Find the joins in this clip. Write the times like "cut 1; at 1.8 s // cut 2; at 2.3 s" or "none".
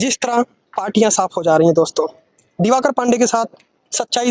none